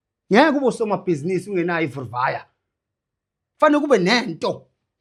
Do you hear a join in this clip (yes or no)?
no